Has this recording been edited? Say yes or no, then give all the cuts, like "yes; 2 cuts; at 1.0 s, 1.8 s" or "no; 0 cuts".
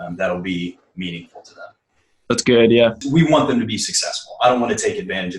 yes; 1 cut; at 3.0 s